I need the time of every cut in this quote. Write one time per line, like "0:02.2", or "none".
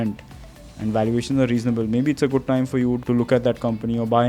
0:03.0